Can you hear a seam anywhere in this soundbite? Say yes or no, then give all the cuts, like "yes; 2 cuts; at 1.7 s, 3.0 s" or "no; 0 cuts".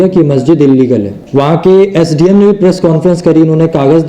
yes; 1 cut; at 1.2 s